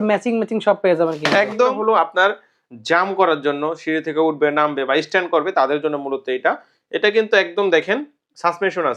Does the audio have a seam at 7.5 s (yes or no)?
no